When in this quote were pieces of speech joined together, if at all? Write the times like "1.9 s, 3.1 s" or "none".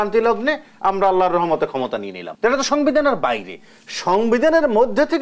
2.2 s